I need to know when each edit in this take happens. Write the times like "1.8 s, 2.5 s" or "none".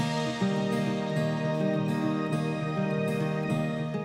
none